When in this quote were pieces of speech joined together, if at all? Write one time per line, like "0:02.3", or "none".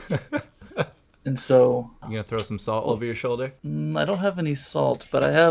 0:02.0
0:03.6